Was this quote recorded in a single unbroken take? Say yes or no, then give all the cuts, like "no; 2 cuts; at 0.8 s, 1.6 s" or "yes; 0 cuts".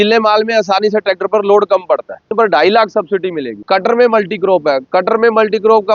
no; 2 cuts; at 2.3 s, 3.5 s